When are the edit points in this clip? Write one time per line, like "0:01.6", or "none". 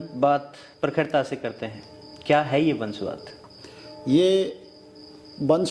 none